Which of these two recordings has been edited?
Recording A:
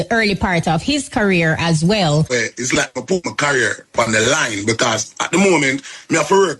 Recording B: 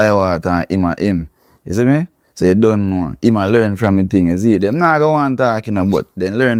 A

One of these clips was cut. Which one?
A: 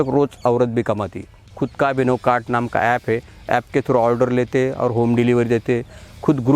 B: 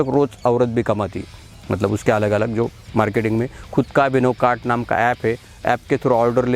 A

